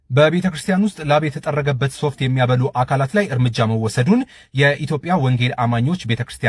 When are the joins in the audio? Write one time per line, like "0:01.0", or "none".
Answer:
none